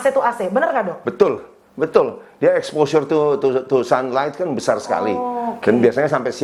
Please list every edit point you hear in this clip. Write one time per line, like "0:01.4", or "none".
none